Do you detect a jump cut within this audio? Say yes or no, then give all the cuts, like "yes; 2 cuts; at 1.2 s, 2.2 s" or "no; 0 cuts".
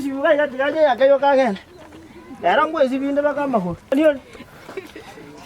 yes; 1 cut; at 3.9 s